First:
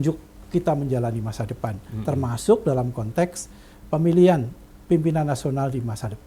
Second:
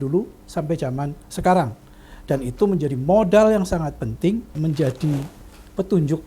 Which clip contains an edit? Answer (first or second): second